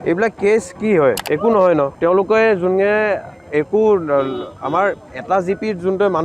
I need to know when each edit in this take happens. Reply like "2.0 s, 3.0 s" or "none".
1.2 s, 1.9 s